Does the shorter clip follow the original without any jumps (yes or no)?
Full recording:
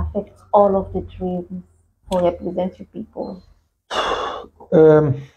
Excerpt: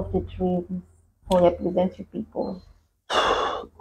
yes